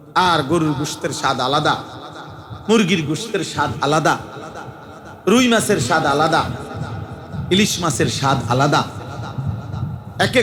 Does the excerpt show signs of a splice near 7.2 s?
no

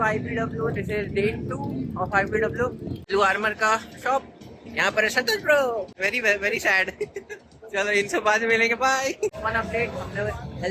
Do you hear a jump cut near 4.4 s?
no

